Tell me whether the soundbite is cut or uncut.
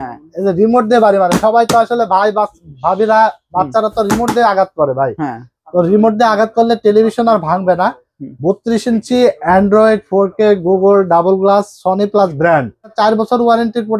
cut